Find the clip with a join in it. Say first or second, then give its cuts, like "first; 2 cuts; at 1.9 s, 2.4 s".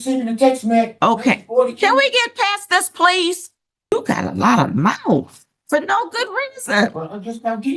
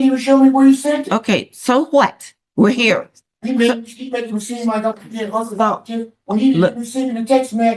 first; 1 cut; at 3.9 s